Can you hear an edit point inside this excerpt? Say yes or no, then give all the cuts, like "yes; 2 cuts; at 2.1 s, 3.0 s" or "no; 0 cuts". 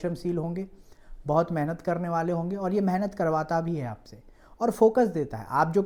no; 0 cuts